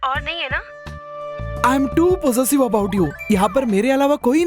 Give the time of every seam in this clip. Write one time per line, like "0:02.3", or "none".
none